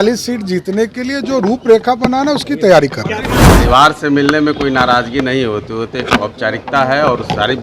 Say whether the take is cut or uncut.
cut